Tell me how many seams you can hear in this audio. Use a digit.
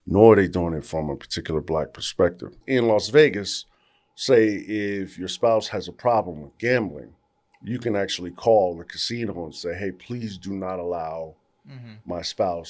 1